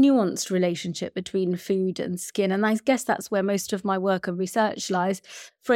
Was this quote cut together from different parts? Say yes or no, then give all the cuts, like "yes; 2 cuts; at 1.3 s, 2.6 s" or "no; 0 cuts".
no; 0 cuts